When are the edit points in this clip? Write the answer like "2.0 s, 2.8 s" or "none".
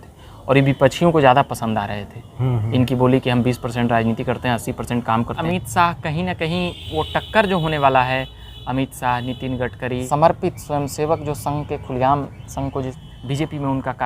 5.4 s, 10.0 s, 13.0 s

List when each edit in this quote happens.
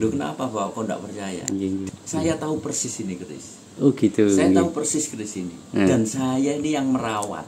1.9 s

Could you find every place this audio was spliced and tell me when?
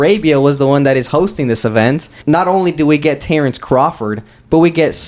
2.2 s

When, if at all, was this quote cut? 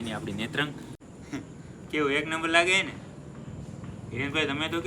1.0 s

